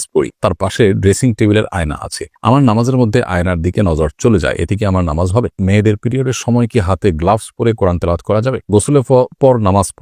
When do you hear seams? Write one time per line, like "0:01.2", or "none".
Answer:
0:05.6
0:08.7